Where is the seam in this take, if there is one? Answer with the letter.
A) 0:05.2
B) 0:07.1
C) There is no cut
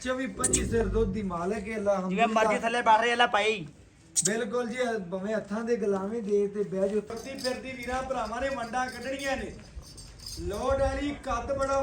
B